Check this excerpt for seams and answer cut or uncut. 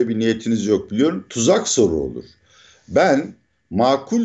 uncut